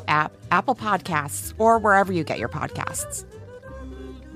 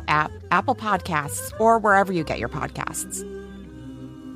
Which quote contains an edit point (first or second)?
second